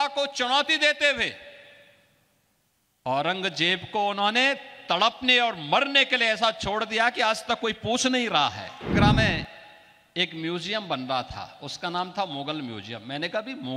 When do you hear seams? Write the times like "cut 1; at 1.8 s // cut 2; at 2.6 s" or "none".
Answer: cut 1; at 8.9 s